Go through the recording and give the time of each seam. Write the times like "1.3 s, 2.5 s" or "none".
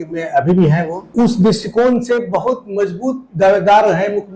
1.1 s